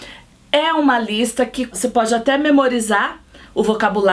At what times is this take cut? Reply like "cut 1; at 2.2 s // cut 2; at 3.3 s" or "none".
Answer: cut 1; at 1.7 s